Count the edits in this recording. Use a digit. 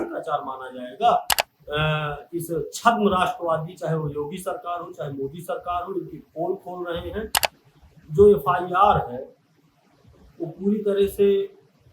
2